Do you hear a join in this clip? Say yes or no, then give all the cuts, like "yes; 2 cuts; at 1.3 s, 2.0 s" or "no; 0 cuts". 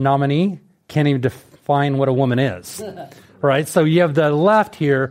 no; 0 cuts